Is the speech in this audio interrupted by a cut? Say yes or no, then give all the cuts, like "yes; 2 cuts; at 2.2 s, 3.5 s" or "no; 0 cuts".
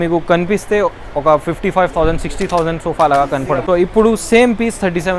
yes; 1 cut; at 3.6 s